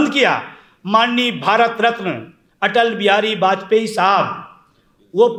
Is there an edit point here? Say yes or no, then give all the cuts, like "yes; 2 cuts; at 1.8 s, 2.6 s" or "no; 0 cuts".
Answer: no; 0 cuts